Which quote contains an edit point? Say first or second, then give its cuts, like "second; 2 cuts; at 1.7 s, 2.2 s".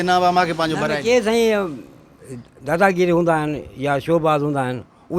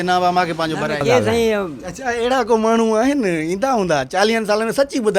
second; 1 cut; at 1.8 s